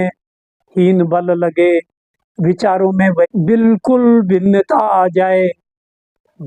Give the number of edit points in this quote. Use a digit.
1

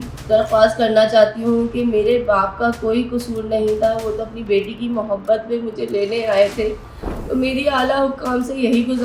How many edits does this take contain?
0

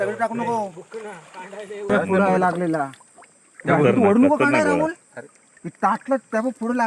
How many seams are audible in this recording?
1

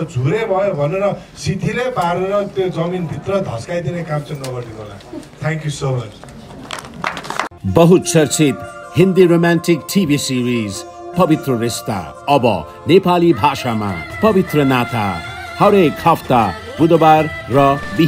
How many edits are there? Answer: 0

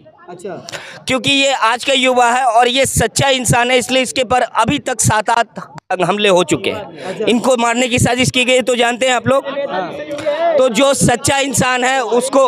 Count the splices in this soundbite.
0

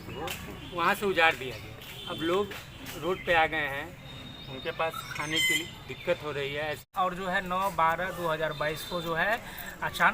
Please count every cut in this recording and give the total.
1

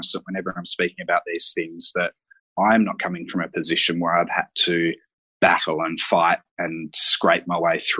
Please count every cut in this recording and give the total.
0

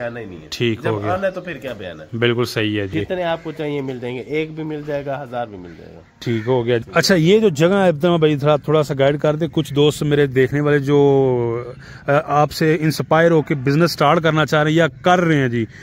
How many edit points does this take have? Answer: 2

